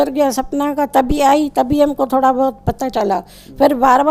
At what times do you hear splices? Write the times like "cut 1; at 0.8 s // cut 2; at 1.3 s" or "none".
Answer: none

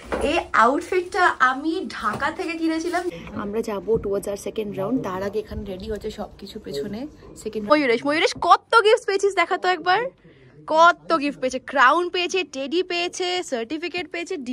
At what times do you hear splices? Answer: cut 1; at 3.1 s // cut 2; at 7.7 s

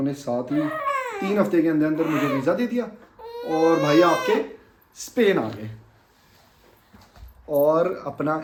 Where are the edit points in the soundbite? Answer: none

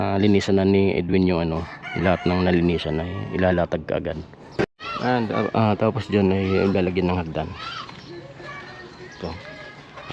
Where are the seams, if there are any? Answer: cut 1; at 4.5 s

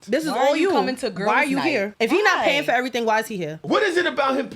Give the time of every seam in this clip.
cut 1; at 1.9 s // cut 2; at 3.6 s

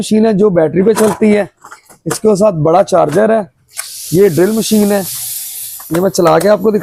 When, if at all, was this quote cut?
none

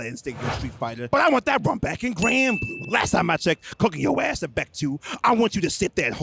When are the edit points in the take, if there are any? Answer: none

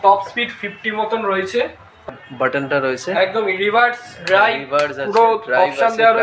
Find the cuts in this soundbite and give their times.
cut 1; at 2.1 s

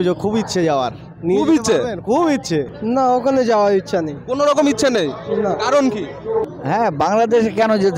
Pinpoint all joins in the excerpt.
cut 1; at 2.7 s // cut 2; at 6.5 s

